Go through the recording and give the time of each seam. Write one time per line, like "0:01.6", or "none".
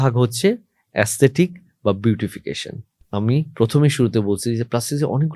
none